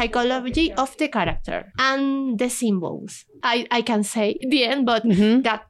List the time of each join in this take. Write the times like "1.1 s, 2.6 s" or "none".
1.7 s, 3.4 s, 4.4 s